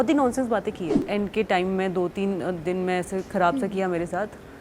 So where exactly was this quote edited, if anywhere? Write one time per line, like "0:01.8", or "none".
0:01.0